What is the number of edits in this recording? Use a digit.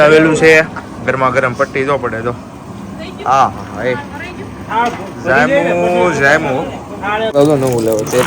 1